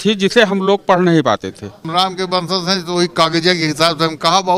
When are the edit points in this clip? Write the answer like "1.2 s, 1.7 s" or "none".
1.8 s